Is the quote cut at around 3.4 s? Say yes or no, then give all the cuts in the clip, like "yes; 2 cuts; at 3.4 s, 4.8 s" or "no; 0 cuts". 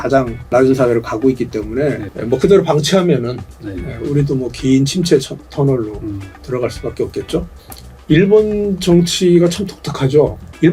no; 1 cut; at 7.6 s